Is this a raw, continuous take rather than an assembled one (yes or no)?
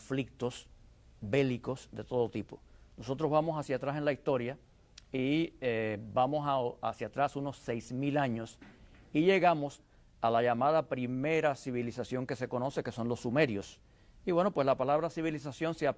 yes